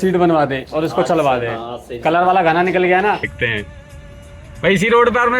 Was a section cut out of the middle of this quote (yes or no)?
yes